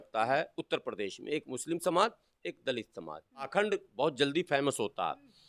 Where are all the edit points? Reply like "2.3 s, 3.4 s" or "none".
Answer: 3.5 s